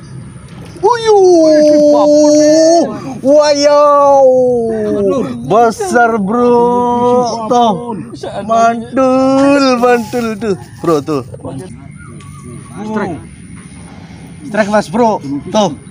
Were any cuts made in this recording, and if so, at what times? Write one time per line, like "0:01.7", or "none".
0:11.7